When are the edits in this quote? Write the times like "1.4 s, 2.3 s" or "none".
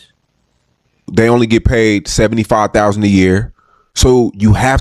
1.1 s